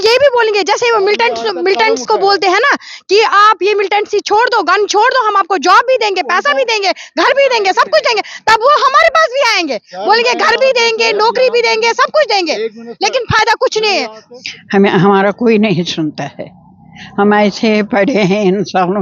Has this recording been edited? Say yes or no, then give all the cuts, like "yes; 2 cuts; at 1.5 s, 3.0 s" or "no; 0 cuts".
no; 0 cuts